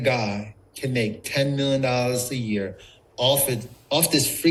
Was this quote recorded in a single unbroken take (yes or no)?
yes